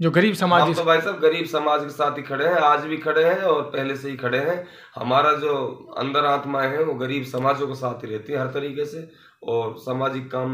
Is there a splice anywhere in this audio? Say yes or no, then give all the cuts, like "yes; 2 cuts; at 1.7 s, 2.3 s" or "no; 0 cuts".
no; 0 cuts